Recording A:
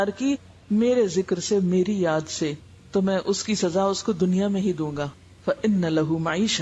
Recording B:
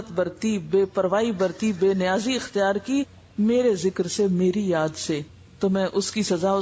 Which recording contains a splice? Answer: A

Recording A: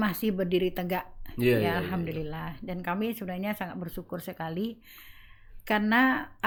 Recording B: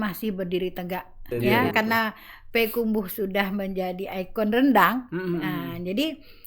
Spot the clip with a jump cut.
B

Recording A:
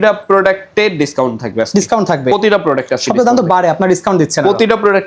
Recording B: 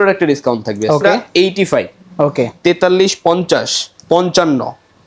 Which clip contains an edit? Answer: B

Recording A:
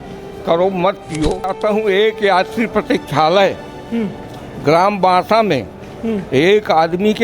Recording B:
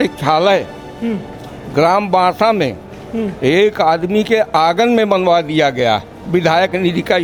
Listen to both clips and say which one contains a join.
A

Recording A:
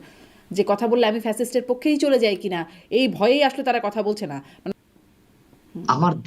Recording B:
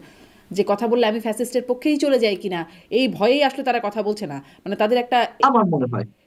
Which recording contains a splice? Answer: A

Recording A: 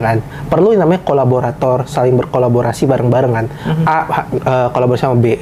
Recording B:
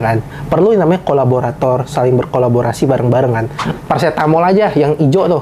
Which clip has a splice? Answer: B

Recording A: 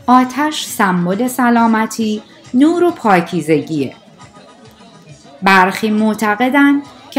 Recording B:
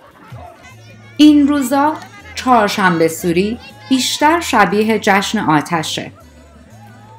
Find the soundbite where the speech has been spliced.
B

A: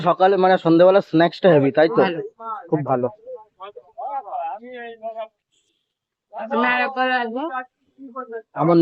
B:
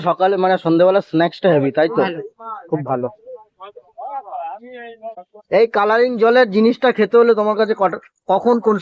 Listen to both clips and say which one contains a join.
B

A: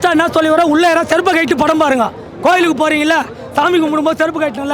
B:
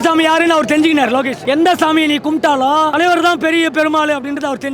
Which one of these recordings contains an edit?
B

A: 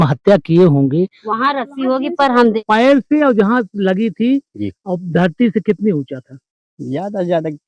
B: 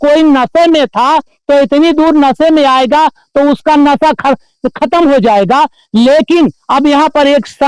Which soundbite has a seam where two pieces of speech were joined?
A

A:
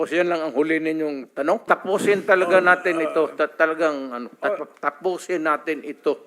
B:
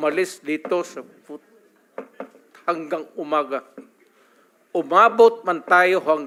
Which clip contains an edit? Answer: A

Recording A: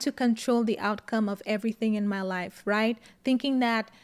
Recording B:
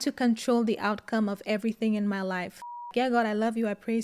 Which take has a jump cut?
B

